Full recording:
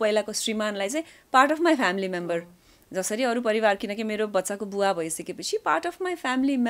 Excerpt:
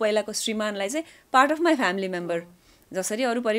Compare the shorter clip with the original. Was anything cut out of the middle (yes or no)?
no